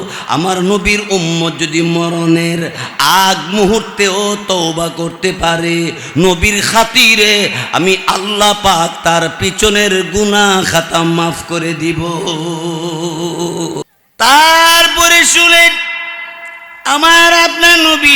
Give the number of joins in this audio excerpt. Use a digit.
1